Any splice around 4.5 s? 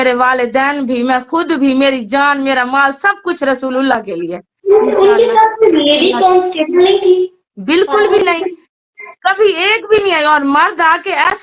yes; 2 cuts; at 4.5 s, 7.5 s

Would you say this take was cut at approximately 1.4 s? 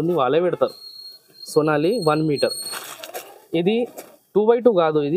no; 1 cut; at 2.8 s

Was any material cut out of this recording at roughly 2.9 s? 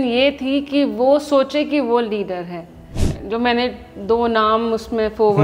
yes; 1 cut; at 2.9 s

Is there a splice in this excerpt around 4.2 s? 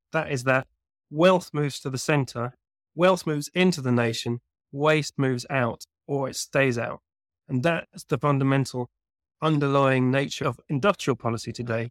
no; 1 cut; at 10.4 s

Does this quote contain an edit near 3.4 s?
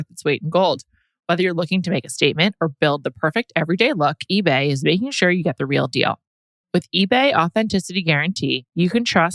no; 0 cuts

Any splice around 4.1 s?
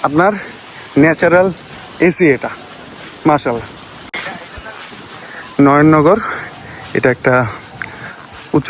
yes; 1 cut; at 4.1 s

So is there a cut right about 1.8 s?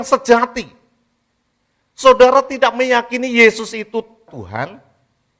no; 1 cut; at 4.3 s

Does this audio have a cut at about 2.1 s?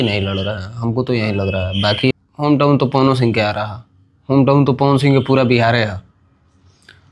yes; 1 cut; at 2.1 s

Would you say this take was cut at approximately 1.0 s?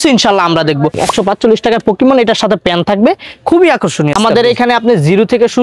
yes; 2 cuts; at 1.0 s, 4.1 s

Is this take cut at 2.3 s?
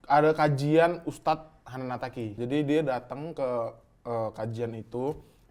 yes; 1 cut; at 2.3 s

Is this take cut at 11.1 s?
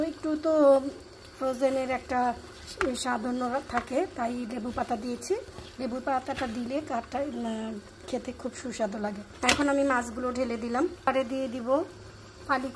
yes; 1 cut; at 11.1 s

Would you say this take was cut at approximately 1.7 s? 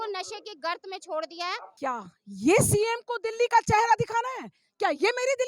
yes; 1 cut; at 1.7 s

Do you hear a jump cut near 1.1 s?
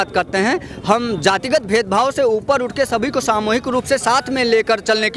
no; 0 cuts

